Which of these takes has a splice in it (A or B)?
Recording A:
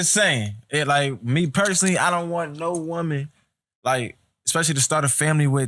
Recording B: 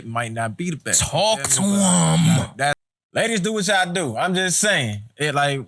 B